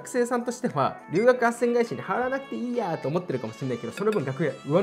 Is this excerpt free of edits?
yes; 0 cuts

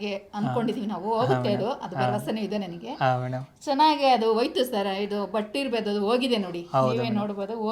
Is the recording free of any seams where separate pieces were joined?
yes; 0 cuts

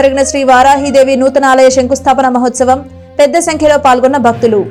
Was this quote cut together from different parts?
no; 0 cuts

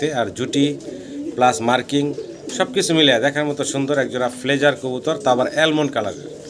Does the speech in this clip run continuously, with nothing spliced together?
yes; 0 cuts

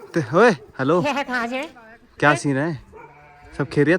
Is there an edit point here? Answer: yes; 1 cut; at 1.7 s

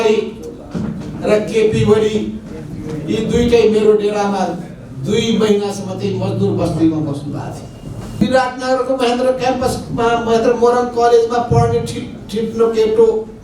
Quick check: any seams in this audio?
yes; 1 cut; at 8.2 s

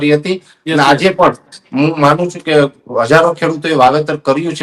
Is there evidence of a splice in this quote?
no; 0 cuts

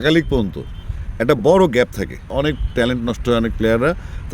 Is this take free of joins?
no; 1 cut; at 2.3 s

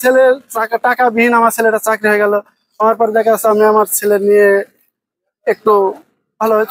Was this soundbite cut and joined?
no; 0 cuts

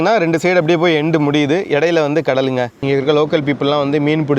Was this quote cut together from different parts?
yes; 1 cut; at 2.8 s

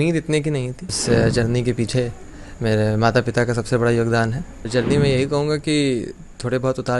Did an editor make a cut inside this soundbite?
yes; 2 cuts; at 1.0 s, 4.6 s

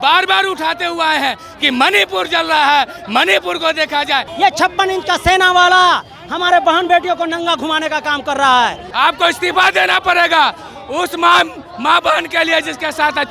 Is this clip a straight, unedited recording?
no; 2 cuts; at 4.3 s, 8.8 s

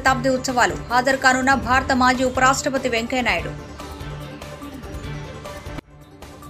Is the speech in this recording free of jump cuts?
no; 2 cuts; at 3.5 s, 5.3 s

